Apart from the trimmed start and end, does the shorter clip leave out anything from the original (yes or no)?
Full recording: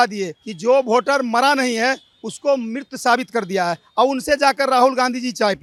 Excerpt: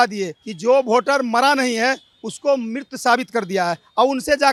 no